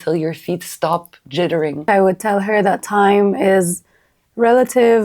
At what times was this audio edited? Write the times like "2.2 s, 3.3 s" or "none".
1.9 s